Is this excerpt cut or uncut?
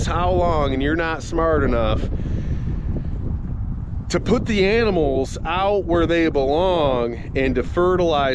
uncut